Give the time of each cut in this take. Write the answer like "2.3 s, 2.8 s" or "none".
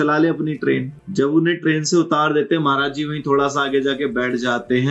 1.0 s